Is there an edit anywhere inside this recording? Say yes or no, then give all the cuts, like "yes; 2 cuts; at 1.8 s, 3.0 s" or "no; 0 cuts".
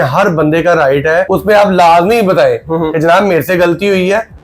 yes; 1 cut; at 1.3 s